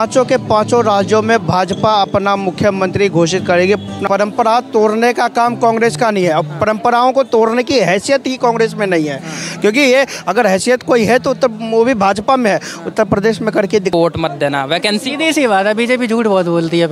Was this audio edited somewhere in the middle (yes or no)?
yes